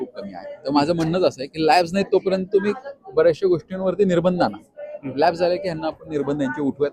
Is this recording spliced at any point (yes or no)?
no